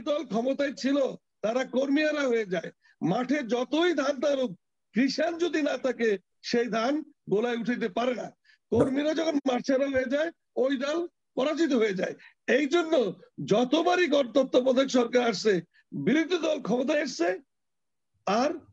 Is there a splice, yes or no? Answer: no